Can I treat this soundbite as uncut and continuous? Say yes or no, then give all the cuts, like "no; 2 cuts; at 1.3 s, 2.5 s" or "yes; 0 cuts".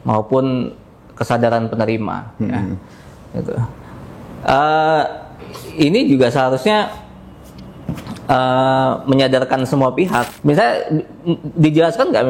no; 1 cut; at 10.3 s